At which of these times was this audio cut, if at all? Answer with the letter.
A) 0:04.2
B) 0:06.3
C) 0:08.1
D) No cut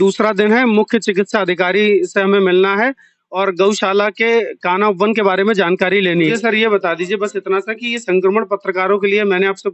B